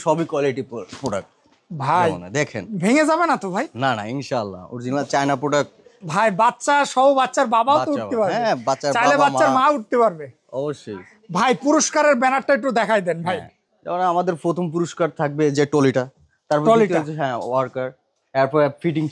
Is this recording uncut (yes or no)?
yes